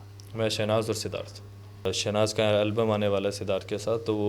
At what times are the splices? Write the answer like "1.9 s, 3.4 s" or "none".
1.9 s